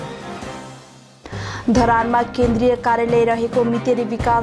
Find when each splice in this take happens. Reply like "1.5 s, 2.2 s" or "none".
none